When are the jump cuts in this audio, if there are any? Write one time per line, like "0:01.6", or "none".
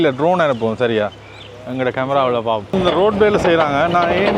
0:02.7